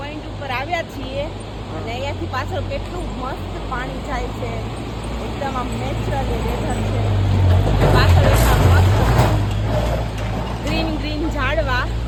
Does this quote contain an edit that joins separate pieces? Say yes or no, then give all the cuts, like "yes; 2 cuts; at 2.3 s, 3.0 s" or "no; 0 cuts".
no; 0 cuts